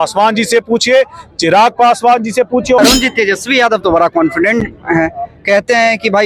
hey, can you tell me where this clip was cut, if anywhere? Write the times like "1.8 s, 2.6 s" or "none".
2.8 s